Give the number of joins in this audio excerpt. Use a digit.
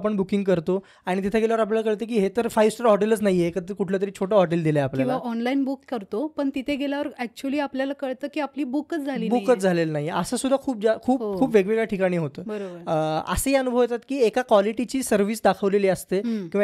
0